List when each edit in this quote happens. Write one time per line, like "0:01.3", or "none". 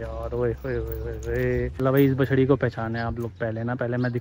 0:01.8